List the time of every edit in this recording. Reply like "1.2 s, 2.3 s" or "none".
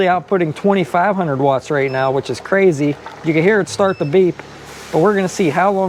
none